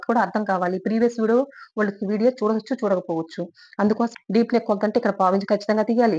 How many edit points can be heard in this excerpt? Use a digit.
1